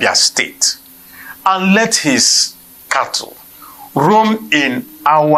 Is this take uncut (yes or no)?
yes